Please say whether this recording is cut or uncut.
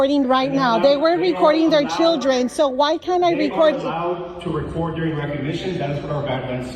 uncut